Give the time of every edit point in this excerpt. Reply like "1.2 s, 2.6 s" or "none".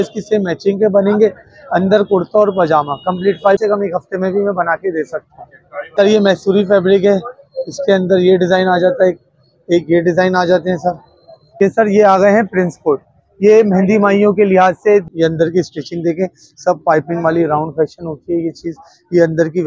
3.6 s, 5.8 s, 11.6 s, 15.1 s

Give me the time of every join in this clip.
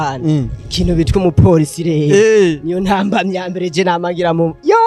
none

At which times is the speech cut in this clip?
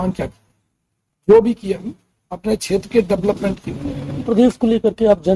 4.3 s

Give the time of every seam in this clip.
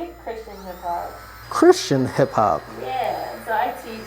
1.3 s

